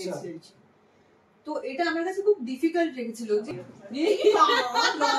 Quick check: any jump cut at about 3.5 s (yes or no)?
yes